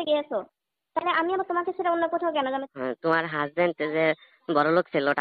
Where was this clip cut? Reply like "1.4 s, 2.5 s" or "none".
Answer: 2.7 s